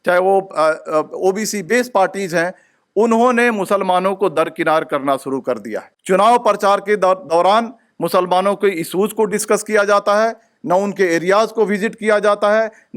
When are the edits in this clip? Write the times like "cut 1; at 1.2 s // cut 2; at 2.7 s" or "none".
cut 1; at 5.9 s